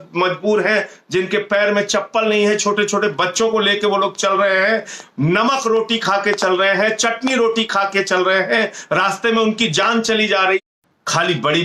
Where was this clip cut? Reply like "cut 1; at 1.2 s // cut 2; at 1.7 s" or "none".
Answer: cut 1; at 10.6 s